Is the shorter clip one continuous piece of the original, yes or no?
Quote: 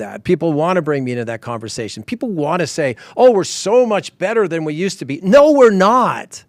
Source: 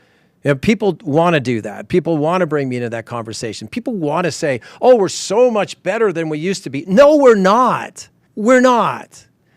yes